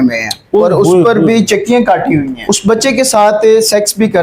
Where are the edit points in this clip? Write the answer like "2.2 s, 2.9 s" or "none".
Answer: 2.5 s